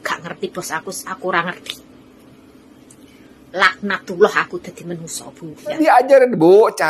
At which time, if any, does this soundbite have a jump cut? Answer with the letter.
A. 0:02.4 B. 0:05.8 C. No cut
B